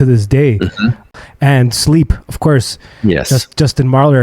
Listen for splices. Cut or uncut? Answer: cut